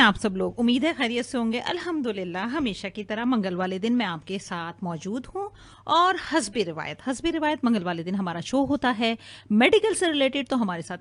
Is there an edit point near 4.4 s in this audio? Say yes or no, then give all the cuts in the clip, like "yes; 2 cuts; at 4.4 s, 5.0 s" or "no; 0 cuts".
no; 1 cut; at 2.9 s